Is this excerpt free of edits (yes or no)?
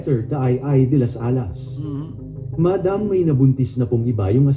yes